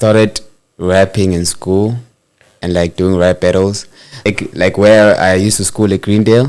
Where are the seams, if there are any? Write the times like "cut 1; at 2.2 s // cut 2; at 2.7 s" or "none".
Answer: cut 1; at 4.2 s